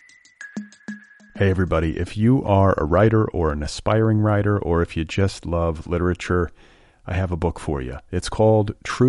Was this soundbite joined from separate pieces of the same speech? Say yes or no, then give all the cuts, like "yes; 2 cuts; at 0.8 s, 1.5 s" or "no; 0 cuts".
yes; 1 cut; at 0.9 s